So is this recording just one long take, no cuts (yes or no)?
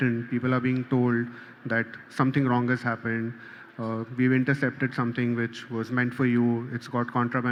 yes